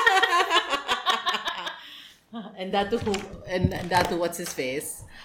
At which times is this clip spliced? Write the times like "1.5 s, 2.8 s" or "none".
none